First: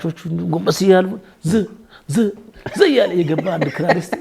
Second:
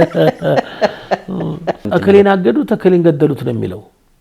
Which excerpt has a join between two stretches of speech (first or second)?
second